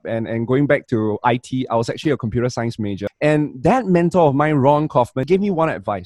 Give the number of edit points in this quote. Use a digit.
2